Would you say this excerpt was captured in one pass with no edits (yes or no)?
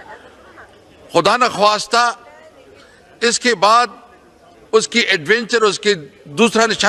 yes